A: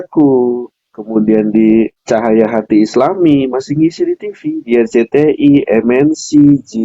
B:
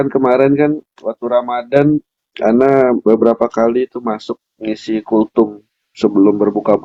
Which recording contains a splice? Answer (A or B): A